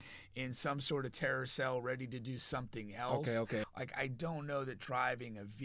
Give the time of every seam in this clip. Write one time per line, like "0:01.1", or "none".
0:03.6